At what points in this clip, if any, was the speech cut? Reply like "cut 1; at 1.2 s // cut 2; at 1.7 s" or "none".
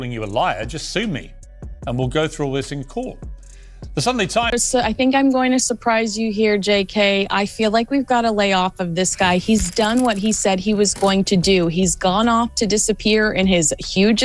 cut 1; at 4.5 s